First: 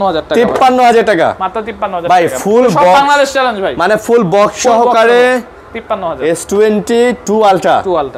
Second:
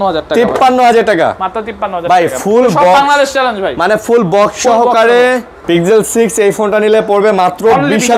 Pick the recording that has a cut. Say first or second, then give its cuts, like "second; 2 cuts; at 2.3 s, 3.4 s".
second; 1 cut; at 5.5 s